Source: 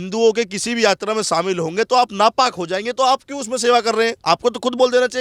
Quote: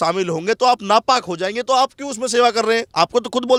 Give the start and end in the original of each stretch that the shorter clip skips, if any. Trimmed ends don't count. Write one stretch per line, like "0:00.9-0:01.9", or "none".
none